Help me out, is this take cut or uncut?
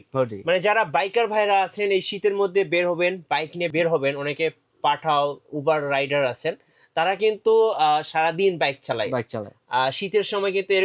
cut